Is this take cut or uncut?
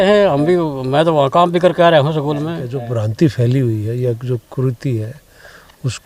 cut